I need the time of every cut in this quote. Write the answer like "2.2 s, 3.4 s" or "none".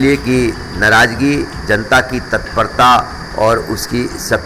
none